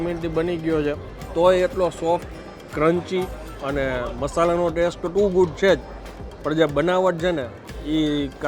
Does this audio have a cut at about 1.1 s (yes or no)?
yes